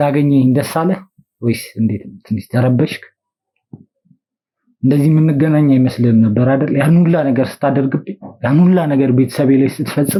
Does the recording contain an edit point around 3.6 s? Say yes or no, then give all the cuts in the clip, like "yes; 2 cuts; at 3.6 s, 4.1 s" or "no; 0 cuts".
no; 0 cuts